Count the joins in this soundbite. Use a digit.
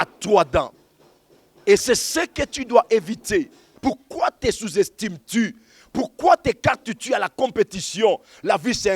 1